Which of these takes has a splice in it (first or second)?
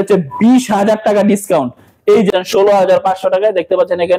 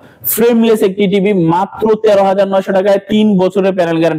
first